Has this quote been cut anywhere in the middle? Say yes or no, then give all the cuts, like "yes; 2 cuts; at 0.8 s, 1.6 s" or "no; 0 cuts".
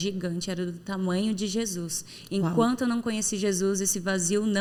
no; 0 cuts